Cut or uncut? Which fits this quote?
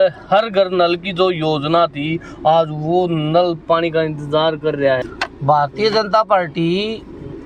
cut